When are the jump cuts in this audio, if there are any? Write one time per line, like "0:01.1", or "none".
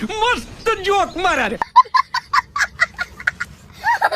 0:01.6